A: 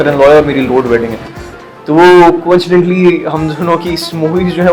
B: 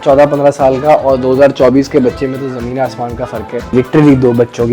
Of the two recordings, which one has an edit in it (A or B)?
B